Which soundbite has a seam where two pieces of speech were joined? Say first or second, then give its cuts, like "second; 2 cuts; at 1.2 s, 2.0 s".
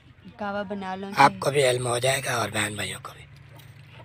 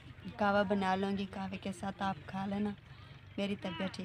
first; 1 cut; at 1.1 s